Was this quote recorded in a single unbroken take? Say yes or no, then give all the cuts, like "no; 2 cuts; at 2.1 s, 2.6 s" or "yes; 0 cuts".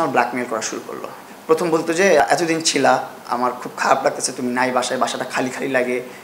no; 2 cuts; at 1.2 s, 2.2 s